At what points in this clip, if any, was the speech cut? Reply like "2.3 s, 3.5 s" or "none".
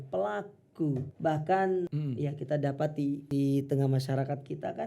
1.1 s, 1.9 s, 3.2 s